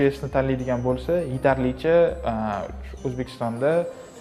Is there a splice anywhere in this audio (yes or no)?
no